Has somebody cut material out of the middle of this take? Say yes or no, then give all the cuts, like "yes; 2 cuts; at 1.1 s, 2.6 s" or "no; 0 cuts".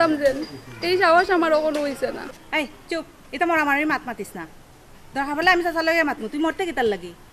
yes; 1 cut; at 2.3 s